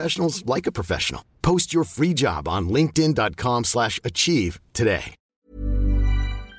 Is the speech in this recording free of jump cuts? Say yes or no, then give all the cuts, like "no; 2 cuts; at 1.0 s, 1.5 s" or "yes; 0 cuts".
no; 1 cut; at 5.3 s